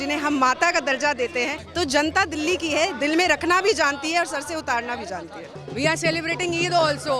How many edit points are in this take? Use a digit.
2